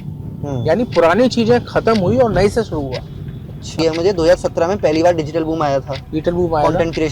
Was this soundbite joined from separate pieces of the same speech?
yes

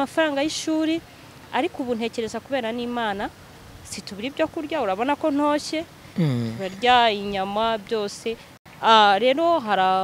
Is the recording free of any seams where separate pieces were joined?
no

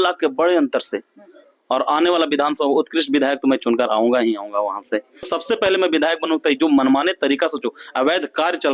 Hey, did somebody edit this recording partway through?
yes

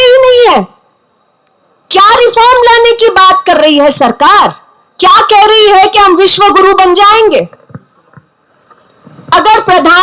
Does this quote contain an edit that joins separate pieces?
no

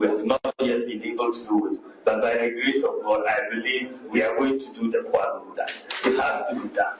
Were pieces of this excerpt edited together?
no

